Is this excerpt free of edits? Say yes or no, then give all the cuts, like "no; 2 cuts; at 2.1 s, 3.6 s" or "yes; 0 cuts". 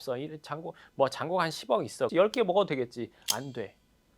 no; 1 cut; at 2.1 s